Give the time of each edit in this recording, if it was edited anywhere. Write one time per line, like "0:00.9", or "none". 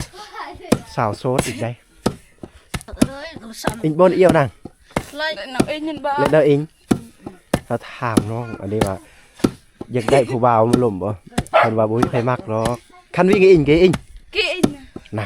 0:02.9